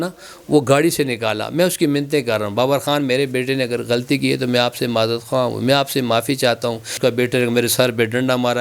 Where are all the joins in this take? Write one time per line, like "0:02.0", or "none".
0:07.0

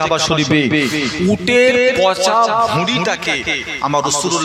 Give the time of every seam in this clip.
none

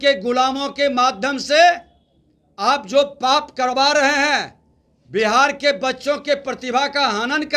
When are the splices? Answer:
none

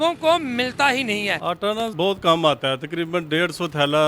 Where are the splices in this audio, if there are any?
0:01.5

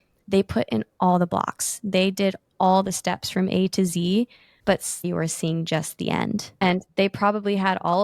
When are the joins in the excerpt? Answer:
0:05.1
0:06.6

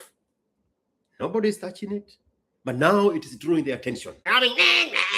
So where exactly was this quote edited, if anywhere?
0:04.3

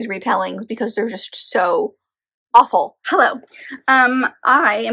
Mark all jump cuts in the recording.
0:03.0

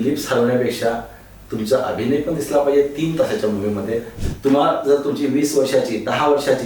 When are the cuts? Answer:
0:04.2

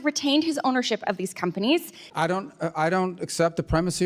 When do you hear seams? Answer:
0:02.0

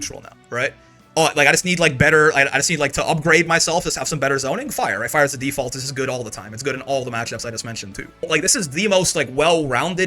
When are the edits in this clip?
0:08.2

